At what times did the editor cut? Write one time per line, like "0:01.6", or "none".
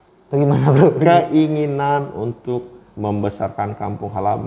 none

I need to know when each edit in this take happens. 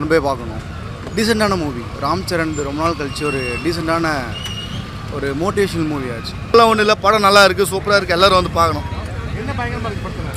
none

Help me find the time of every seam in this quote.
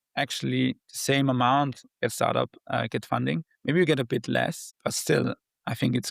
0:04.7

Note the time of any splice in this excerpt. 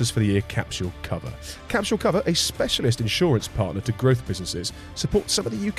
none

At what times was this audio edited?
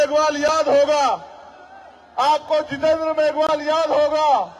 none

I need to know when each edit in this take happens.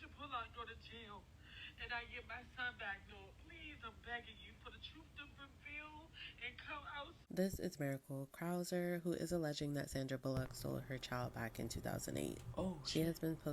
0:07.2

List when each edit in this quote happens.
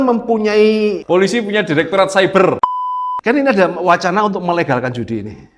0:01.0
0:02.6

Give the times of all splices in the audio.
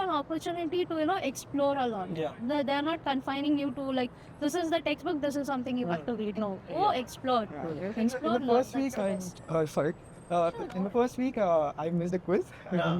none

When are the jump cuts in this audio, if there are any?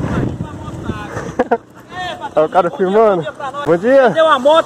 0:03.6

